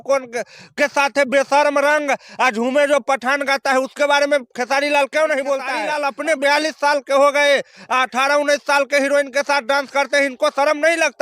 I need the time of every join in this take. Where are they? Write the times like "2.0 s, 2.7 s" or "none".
5.8 s